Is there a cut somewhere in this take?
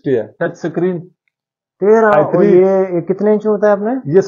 no; 0 cuts

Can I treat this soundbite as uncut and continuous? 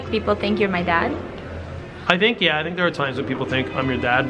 yes; 0 cuts

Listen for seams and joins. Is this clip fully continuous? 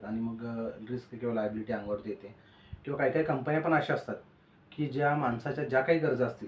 yes; 0 cuts

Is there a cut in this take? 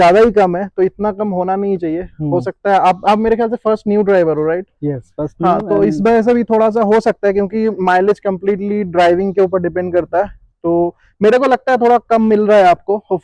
no; 0 cuts

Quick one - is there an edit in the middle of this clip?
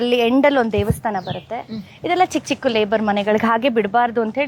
no; 0 cuts

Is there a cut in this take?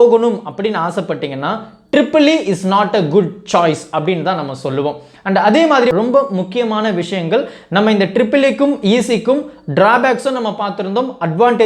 yes; 1 cut; at 5.9 s

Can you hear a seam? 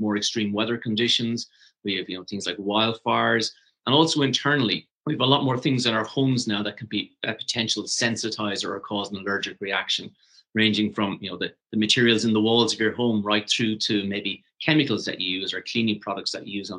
yes; 2 cuts; at 3.7 s, 4.9 s

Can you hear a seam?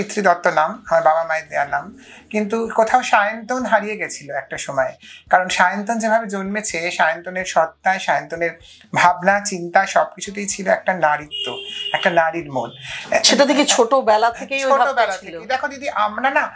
no; 0 cuts

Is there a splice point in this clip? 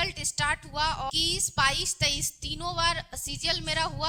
yes; 1 cut; at 1.1 s

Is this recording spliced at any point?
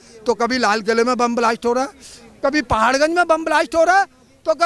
no; 0 cuts

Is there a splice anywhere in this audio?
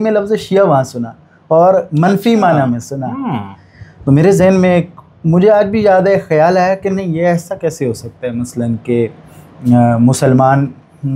no; 0 cuts

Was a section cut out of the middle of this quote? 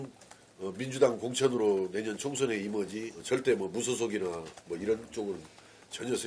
yes; 1 cut; at 3.1 s

